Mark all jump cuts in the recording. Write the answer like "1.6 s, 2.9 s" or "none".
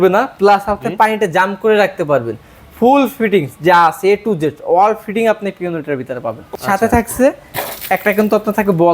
6.4 s